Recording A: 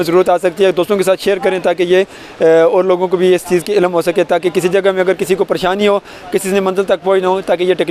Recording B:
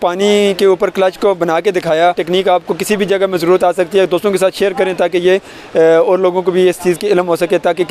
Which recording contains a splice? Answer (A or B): B